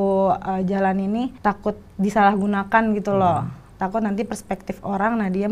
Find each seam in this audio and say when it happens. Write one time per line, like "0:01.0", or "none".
0:01.3